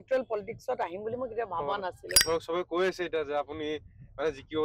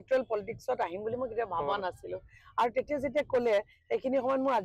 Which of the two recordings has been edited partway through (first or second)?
first